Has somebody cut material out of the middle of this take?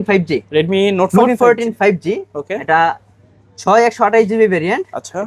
no; 0 cuts

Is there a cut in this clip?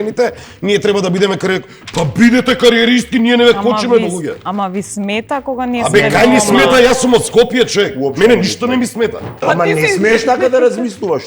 yes; 1 cut; at 9.4 s

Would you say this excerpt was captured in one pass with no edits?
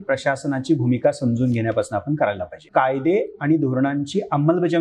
no; 1 cut; at 2.6 s

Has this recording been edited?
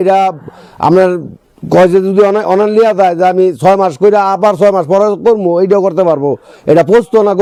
no; 0 cuts

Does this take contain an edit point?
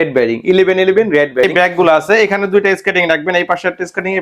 yes; 1 cut; at 1.5 s

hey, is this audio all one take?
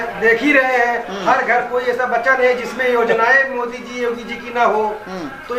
yes; 0 cuts

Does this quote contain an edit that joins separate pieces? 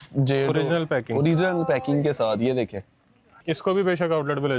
yes; 1 cut; at 3.4 s

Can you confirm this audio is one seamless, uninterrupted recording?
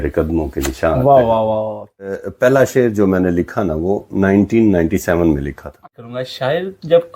no; 2 cuts; at 2.1 s, 5.8 s

